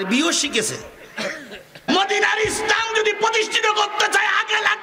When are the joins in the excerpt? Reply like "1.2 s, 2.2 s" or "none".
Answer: 1.9 s